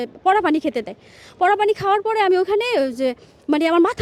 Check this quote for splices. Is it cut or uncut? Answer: uncut